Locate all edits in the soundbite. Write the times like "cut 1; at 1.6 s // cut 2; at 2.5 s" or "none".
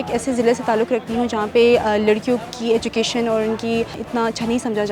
cut 1; at 4.0 s